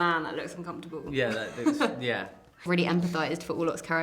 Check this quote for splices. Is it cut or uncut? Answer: cut